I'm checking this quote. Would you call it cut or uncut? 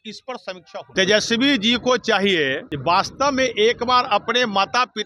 cut